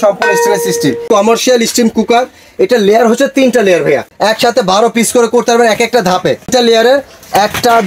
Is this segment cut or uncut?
cut